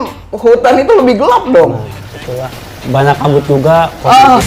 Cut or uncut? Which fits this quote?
uncut